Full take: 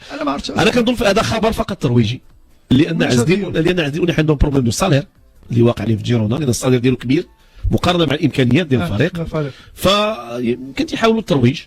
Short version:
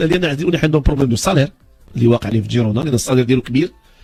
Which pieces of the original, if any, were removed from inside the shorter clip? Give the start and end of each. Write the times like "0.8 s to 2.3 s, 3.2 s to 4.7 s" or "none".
none